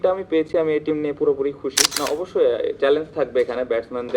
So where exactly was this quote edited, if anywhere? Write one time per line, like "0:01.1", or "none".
0:01.8